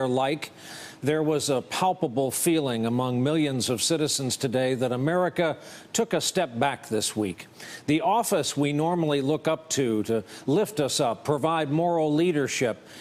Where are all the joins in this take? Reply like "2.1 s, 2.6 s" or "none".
11.1 s